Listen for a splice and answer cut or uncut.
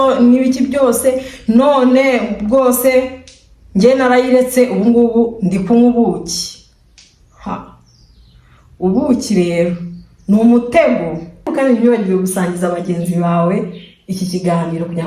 cut